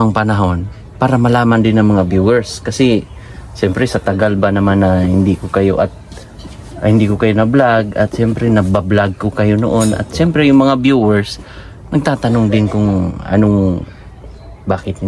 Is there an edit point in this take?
no; 0 cuts

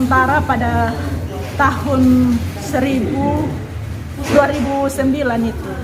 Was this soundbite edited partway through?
no; 0 cuts

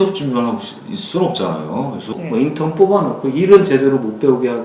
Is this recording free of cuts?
no; 1 cut; at 2.1 s

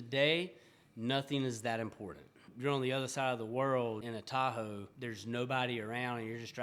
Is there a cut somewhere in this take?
yes; 3 cuts; at 2.5 s, 4.0 s, 4.9 s

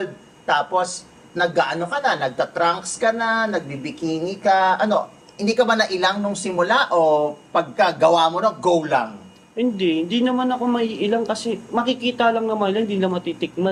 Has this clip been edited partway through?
no; 0 cuts

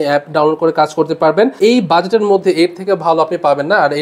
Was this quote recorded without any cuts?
no; 1 cut; at 1.6 s

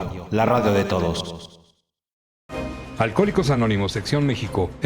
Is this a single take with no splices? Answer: no; 1 cut; at 2.3 s

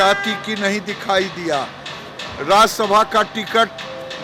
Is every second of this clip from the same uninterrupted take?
yes; 0 cuts

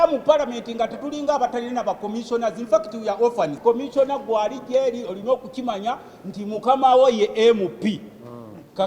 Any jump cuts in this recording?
yes; 1 cut; at 3.6 s

